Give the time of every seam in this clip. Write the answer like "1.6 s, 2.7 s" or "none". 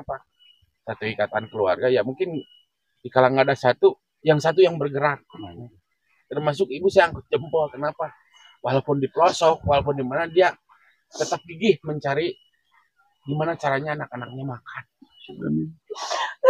15.4 s